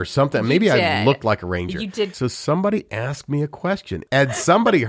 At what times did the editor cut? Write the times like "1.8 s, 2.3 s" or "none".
2.1 s, 3.9 s